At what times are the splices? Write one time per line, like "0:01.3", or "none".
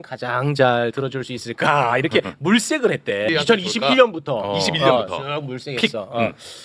0:03.3